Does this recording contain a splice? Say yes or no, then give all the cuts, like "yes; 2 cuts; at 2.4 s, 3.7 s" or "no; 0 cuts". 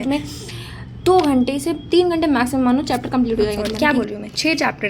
yes; 1 cut; at 3.6 s